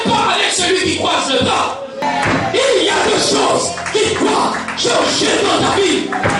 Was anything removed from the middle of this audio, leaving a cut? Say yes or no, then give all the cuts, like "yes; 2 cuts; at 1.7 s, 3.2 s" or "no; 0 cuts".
yes; 1 cut; at 2.0 s